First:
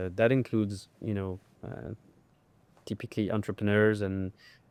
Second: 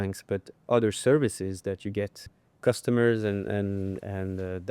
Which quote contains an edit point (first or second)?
second